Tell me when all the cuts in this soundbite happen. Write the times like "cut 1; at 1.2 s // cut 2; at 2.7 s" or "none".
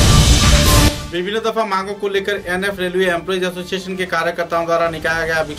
cut 1; at 0.9 s

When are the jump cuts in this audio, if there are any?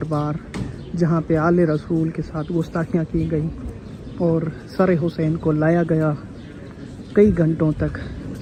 none

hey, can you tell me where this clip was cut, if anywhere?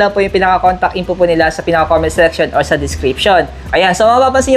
none

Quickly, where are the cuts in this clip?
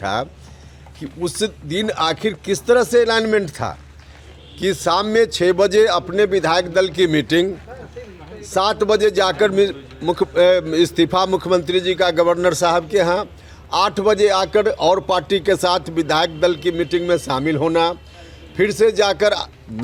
none

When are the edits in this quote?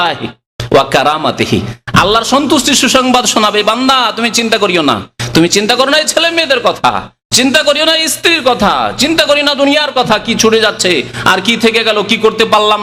none

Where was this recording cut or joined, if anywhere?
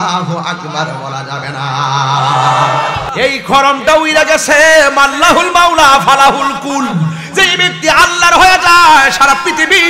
cut 1; at 3.0 s

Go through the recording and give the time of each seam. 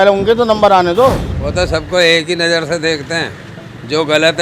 cut 1; at 1.2 s

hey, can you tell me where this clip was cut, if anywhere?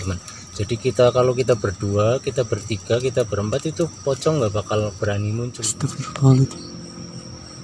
cut 1; at 5.6 s

